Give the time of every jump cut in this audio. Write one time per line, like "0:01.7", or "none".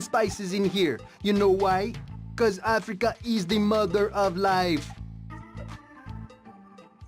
0:04.8